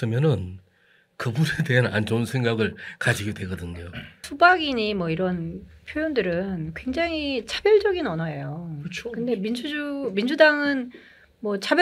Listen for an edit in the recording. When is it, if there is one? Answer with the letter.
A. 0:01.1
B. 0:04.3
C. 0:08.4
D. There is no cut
B